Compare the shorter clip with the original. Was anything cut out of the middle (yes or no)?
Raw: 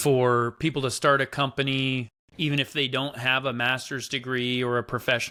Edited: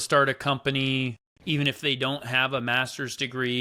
no